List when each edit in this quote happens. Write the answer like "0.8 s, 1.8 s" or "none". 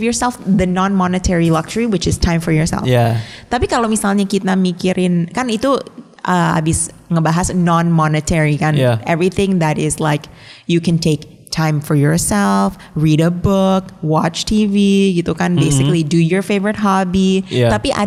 none